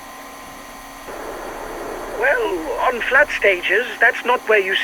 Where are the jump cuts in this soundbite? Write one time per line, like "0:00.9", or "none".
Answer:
0:01.1